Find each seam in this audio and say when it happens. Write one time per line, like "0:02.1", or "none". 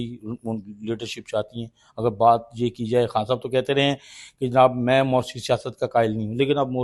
none